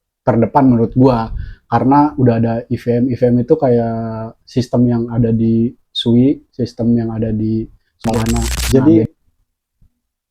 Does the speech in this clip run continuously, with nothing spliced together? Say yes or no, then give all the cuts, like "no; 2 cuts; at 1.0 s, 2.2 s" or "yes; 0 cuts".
no; 1 cut; at 8.5 s